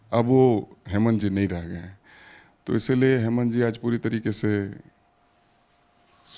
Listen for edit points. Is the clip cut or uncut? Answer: uncut